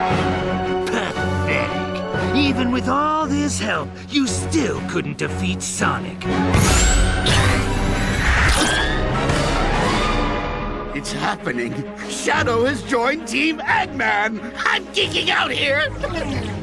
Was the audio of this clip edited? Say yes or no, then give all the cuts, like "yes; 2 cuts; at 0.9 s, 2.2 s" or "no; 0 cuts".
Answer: no; 0 cuts